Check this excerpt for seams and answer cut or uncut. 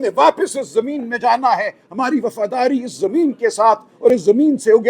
uncut